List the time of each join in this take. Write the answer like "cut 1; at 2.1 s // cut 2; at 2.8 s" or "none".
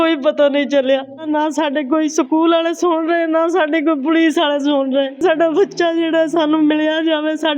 cut 1; at 1.2 s // cut 2; at 5.2 s

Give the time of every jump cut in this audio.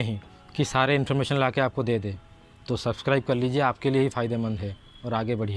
none

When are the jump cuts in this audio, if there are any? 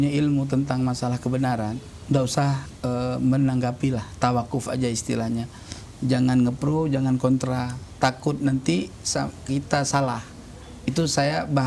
cut 1; at 1.9 s // cut 2; at 2.7 s

